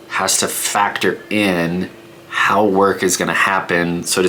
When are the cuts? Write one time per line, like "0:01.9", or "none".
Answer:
none

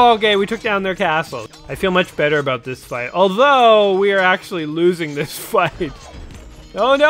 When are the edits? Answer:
0:01.4

